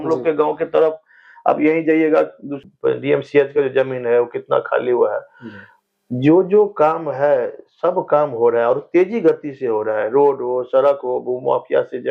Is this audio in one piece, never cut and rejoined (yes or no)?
no